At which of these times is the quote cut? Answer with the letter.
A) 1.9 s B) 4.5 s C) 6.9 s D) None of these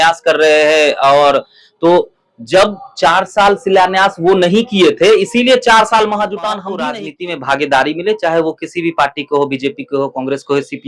C